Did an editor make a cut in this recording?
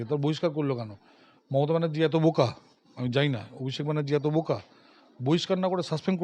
no; 0 cuts

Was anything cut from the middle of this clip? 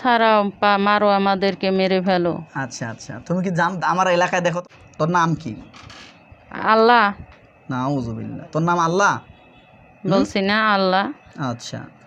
yes; 1 cut; at 4.6 s

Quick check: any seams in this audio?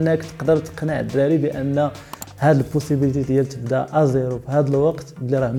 no; 0 cuts

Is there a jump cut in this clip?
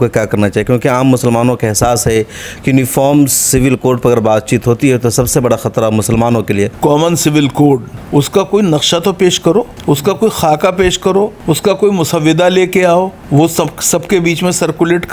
yes; 5 cuts; at 6.7 s, 7.9 s, 9.7 s, 11.4 s, 13.2 s

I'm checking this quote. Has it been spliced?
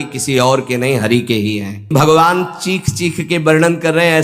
yes; 1 cut; at 1.9 s

